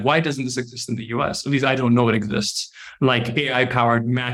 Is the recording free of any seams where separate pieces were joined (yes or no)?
yes